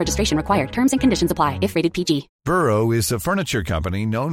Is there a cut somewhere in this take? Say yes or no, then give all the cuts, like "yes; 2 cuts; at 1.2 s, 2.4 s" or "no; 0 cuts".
yes; 1 cut; at 2.3 s